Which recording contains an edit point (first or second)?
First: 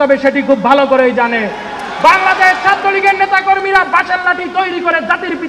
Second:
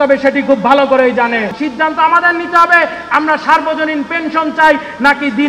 second